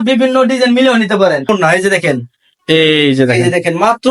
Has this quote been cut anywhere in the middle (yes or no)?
yes